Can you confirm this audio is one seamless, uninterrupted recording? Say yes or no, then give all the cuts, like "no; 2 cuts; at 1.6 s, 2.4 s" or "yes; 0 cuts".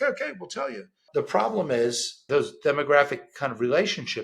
no; 2 cuts; at 1.0 s, 2.3 s